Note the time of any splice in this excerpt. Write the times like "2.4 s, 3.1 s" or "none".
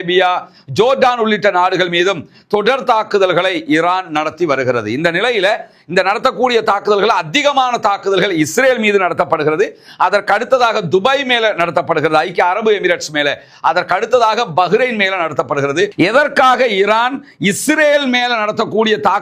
15.9 s